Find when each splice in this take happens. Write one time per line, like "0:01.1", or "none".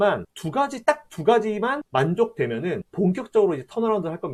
none